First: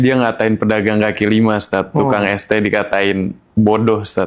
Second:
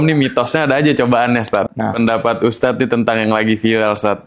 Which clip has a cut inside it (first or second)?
second